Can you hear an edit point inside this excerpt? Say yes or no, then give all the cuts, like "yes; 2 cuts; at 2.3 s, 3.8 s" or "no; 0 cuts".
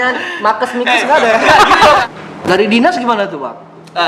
yes; 1 cut; at 2.0 s